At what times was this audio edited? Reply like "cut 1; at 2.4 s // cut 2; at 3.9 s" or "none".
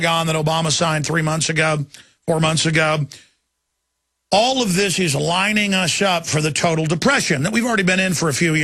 none